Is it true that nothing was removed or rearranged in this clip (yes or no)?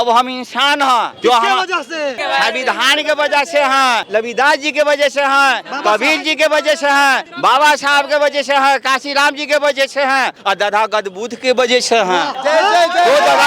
no